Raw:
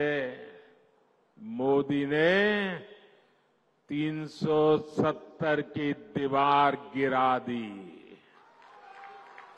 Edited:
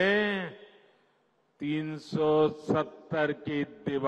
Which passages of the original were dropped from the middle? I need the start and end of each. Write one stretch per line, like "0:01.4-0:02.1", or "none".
none